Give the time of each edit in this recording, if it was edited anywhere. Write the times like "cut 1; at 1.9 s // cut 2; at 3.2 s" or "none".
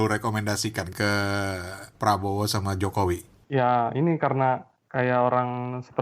cut 1; at 0.9 s // cut 2; at 1.9 s // cut 3; at 3.3 s // cut 4; at 4.8 s